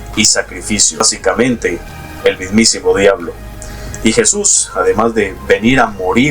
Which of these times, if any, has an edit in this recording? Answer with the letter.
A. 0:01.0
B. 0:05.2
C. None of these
A